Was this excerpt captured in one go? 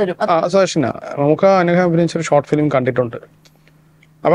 no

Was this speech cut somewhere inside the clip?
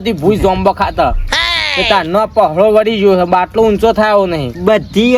no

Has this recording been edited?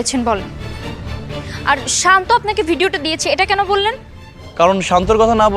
no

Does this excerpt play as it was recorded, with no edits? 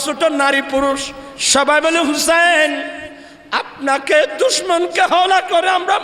yes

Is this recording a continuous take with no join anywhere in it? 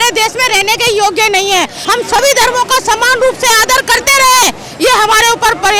no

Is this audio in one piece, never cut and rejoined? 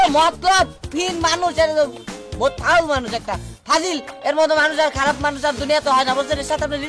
yes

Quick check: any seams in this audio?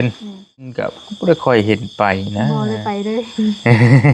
yes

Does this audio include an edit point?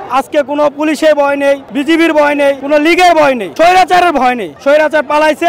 yes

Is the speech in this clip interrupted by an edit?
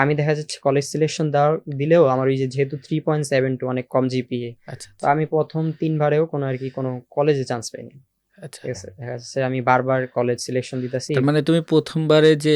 no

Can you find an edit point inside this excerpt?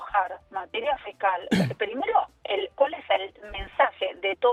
no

